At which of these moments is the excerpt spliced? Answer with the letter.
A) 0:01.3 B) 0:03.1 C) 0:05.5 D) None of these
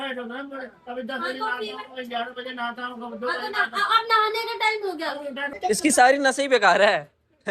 C